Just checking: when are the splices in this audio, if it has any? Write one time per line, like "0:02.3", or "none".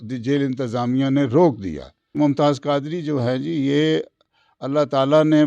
0:02.1